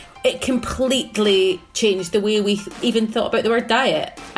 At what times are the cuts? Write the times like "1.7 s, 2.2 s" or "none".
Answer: 1.7 s, 2.8 s